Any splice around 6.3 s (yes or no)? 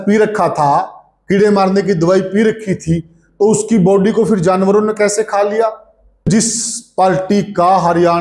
yes